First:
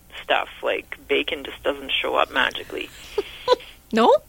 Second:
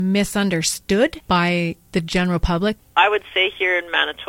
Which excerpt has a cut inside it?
second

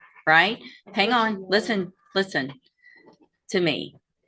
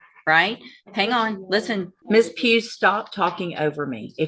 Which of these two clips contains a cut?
second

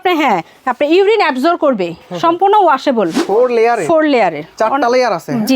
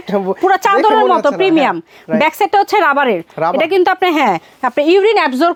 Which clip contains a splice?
first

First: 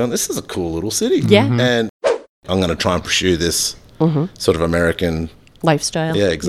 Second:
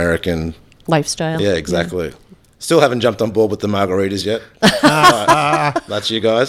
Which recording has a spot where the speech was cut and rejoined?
first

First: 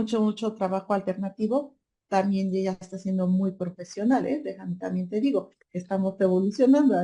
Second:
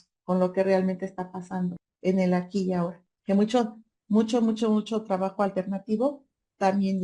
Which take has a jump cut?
second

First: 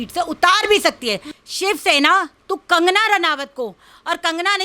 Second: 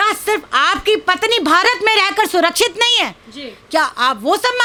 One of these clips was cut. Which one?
first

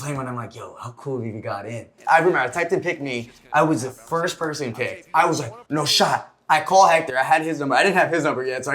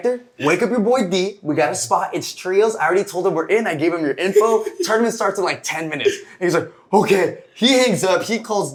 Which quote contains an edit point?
first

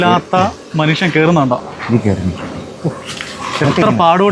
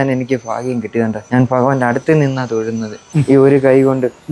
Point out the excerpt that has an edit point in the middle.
second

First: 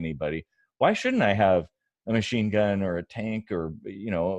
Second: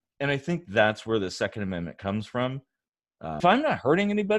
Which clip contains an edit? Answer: second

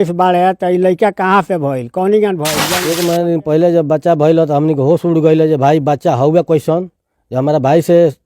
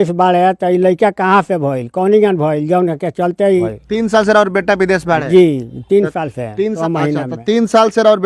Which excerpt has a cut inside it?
first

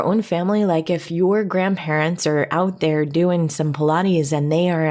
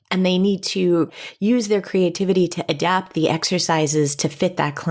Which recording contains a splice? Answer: first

